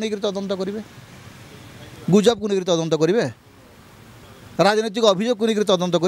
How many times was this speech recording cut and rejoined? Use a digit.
0